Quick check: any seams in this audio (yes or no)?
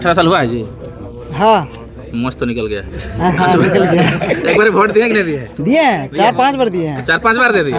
no